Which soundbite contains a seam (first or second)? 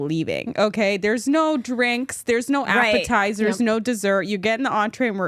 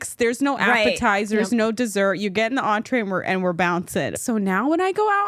second